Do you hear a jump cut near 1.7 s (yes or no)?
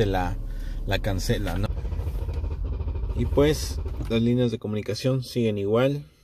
yes